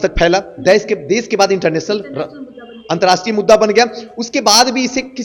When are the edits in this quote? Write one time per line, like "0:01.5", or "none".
none